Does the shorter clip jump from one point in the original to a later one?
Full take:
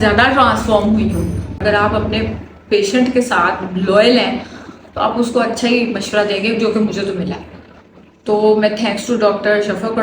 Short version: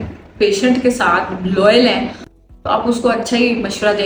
no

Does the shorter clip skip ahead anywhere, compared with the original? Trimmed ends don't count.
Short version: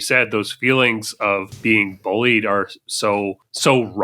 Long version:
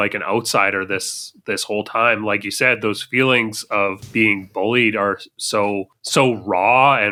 no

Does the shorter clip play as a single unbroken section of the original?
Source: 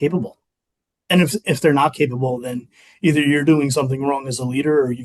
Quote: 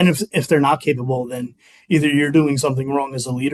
yes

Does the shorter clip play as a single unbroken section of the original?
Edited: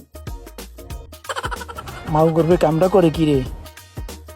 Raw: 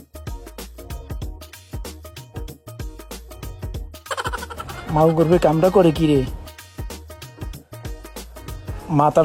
no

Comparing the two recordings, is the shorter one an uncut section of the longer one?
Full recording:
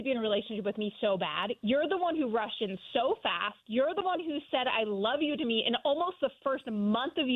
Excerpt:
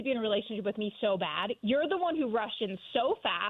yes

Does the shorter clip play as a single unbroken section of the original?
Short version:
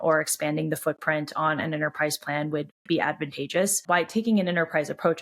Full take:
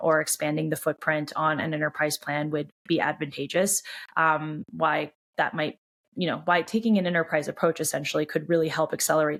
no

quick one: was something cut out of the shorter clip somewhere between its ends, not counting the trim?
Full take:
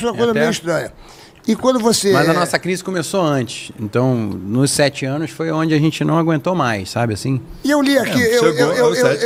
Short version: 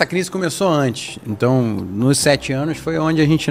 no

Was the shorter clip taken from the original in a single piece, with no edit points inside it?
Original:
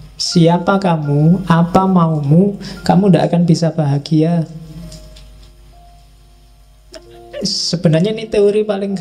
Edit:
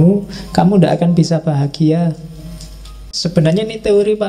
no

